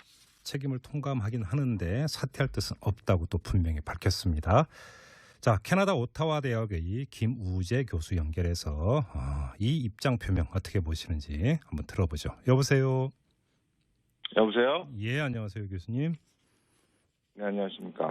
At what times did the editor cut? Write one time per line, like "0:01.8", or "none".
0:10.2